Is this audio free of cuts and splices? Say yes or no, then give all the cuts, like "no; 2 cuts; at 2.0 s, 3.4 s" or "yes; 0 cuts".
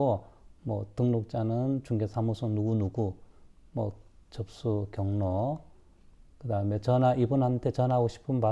yes; 0 cuts